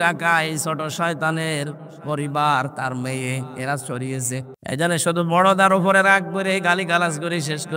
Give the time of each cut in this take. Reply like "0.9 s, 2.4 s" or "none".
4.5 s

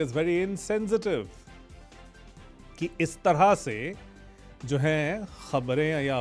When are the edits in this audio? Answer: none

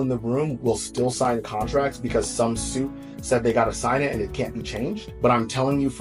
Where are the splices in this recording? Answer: 5.1 s

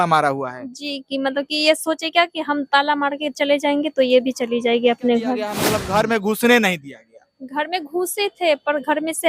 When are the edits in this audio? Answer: 5.7 s

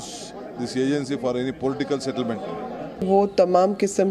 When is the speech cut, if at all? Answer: 3.0 s

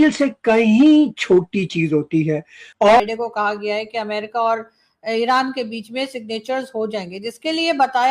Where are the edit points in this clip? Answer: 3.0 s

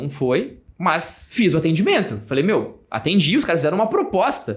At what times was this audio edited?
none

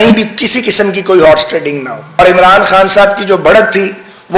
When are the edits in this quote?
2.2 s

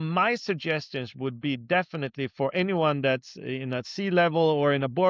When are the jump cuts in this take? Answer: none

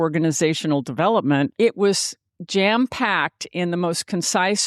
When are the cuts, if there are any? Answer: 1.5 s

